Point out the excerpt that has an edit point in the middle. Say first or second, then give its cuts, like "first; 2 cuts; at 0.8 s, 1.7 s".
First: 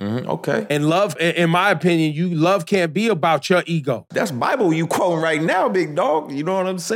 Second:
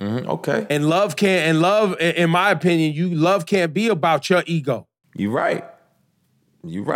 first; 2 cuts; at 1.1 s, 4.1 s